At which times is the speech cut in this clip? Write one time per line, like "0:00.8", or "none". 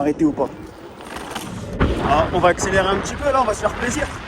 0:01.8